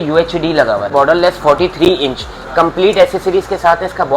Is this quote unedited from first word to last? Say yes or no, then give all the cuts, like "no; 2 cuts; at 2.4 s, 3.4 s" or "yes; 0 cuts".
no; 1 cut; at 0.9 s